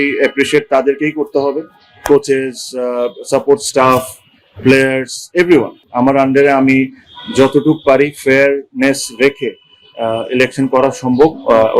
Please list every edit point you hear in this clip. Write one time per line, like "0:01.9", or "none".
0:05.8